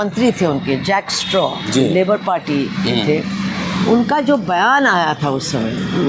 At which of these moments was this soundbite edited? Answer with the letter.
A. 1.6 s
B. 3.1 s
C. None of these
C